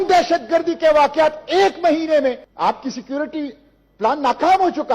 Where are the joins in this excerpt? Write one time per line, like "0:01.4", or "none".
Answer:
0:02.5